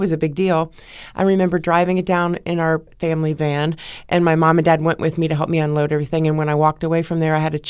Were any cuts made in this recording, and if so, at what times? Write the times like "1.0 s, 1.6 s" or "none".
2.9 s